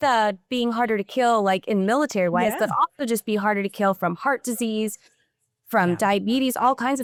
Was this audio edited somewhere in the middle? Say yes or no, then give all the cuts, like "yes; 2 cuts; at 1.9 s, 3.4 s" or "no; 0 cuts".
no; 0 cuts